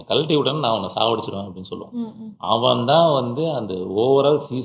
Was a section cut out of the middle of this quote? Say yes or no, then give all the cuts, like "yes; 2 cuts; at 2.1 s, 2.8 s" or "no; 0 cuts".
no; 0 cuts